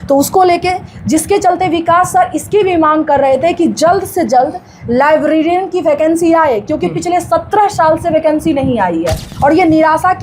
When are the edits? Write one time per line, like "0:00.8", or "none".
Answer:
0:09.2